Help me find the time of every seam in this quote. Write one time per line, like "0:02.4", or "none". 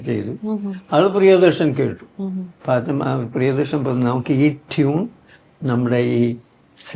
none